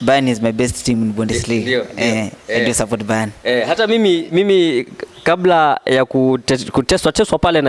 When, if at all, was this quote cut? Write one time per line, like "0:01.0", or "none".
none